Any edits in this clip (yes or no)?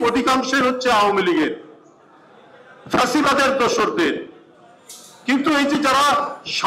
no